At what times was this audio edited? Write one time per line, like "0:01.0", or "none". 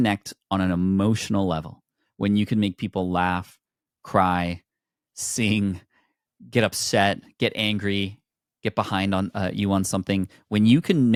none